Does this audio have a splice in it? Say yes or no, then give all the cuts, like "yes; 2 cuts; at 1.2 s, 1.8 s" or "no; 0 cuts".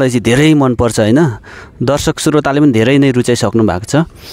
no; 0 cuts